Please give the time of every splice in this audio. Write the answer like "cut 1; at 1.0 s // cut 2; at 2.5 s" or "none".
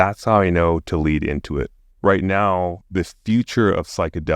cut 1; at 1.9 s